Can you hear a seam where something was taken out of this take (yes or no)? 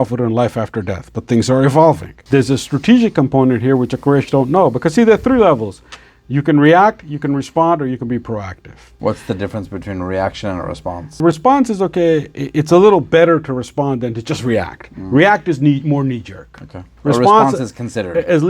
yes